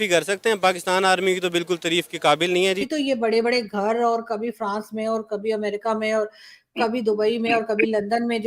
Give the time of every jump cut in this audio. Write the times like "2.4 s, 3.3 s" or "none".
2.8 s